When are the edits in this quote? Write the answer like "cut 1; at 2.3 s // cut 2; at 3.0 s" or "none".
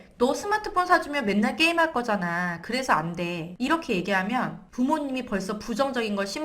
cut 1; at 3.5 s // cut 2; at 4.6 s